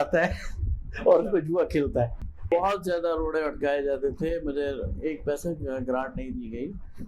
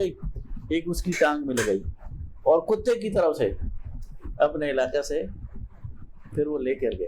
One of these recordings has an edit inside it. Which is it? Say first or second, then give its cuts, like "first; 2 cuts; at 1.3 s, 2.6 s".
first; 1 cut; at 2.5 s